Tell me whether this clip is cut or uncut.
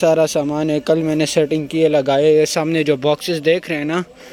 uncut